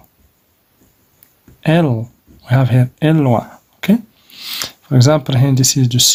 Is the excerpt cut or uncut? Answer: uncut